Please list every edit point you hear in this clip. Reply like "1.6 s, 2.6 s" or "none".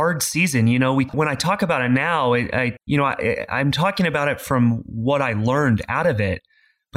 1.1 s, 2.8 s